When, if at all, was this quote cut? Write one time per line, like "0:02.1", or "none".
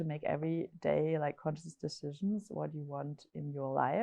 none